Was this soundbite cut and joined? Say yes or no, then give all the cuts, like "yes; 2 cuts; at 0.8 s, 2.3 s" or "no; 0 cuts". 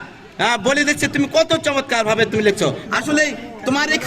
yes; 1 cut; at 2.8 s